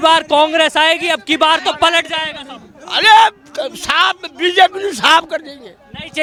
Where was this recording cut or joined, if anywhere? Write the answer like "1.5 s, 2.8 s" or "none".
none